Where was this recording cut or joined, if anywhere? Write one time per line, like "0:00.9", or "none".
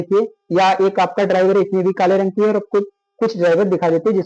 none